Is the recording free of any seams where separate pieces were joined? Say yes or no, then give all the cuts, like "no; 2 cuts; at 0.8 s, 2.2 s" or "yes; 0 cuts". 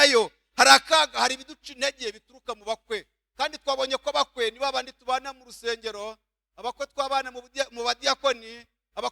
yes; 0 cuts